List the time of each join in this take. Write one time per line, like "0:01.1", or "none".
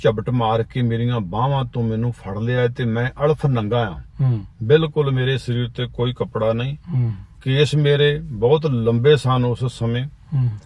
none